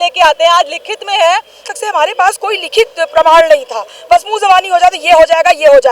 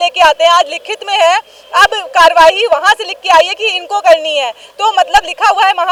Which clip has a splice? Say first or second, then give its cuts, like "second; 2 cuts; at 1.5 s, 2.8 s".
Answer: first; 1 cut; at 1.6 s